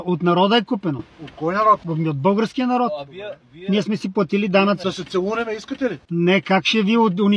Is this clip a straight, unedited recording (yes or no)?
no